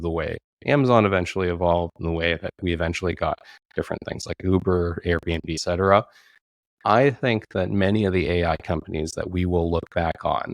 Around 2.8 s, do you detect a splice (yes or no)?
no